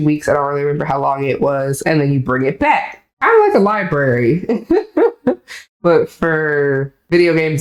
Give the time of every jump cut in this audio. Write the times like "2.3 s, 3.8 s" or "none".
none